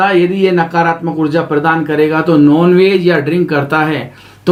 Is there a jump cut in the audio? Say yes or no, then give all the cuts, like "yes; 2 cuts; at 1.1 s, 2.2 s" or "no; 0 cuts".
no; 0 cuts